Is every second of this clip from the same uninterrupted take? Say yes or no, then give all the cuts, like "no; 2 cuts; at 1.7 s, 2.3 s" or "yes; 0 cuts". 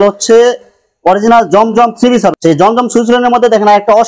no; 1 cut; at 2.3 s